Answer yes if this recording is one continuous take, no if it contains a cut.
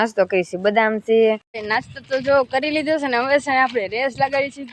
no